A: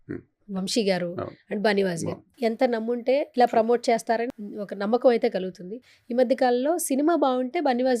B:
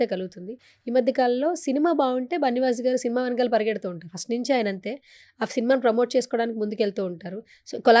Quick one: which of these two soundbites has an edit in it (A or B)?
A